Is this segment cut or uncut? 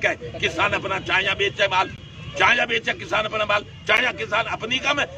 uncut